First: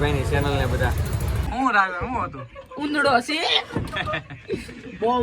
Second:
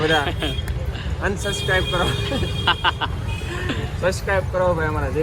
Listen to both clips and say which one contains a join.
first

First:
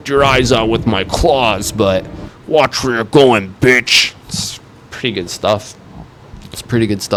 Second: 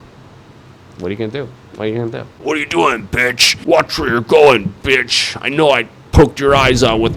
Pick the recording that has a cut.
second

